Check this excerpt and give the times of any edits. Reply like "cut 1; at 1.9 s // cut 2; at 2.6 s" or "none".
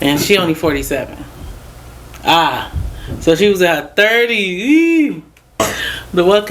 cut 1; at 5.6 s